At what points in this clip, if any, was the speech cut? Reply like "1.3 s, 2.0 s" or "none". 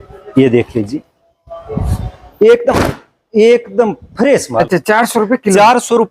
4.5 s